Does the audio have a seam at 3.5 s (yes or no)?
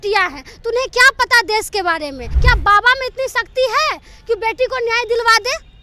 no